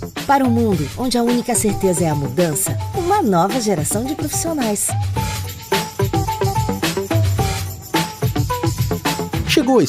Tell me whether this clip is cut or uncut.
uncut